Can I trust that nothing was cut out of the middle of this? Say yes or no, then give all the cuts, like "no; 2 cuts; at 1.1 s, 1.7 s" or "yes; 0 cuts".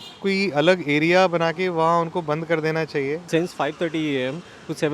no; 1 cut; at 3.2 s